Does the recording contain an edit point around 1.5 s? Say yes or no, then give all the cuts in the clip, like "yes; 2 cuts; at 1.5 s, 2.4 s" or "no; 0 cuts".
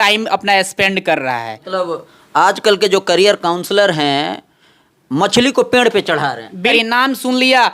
yes; 2 cuts; at 1.5 s, 6.7 s